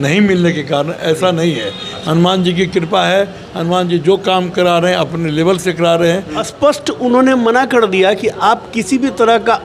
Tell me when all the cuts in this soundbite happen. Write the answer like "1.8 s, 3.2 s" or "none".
1.9 s, 6.4 s